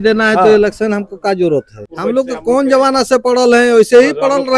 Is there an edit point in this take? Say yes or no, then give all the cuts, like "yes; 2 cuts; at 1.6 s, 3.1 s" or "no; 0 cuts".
yes; 1 cut; at 1.8 s